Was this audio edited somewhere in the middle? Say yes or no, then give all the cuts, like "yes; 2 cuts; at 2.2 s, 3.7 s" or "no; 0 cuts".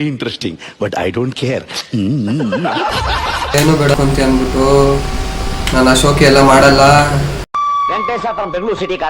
yes; 1 cut; at 3.9 s